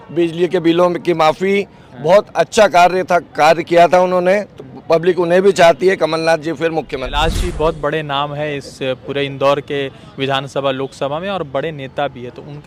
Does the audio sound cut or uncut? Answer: cut